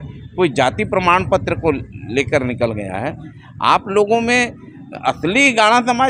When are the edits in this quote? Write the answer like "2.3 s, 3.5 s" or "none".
none